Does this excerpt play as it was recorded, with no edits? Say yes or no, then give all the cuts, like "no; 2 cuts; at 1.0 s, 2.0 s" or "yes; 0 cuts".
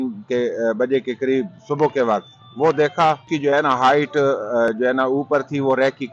no; 1 cut; at 3.3 s